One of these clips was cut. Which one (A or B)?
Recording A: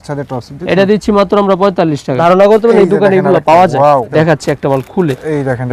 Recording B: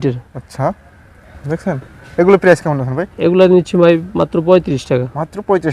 A